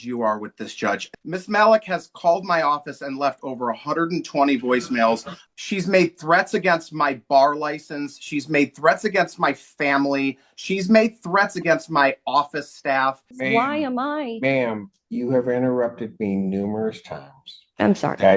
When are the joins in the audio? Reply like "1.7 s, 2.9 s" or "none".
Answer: 1.1 s, 5.3 s, 13.3 s